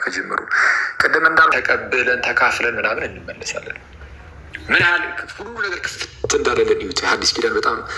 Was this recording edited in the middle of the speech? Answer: yes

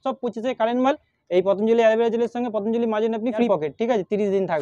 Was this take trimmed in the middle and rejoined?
yes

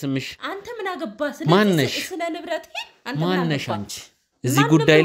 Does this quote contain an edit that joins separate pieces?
no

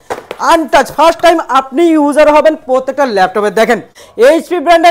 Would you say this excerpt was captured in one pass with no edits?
no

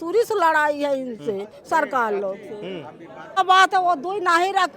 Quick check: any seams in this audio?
yes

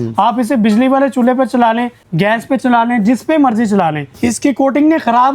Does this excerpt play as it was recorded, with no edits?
no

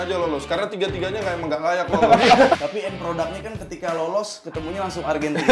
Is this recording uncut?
no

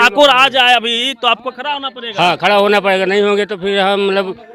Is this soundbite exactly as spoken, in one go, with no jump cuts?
yes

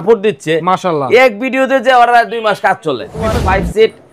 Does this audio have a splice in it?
yes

